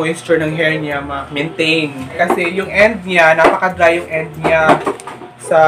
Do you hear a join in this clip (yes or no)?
no